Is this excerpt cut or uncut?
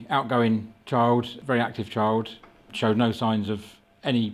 cut